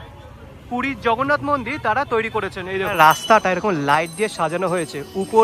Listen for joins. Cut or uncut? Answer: cut